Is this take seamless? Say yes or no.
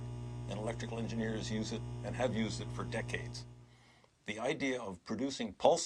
yes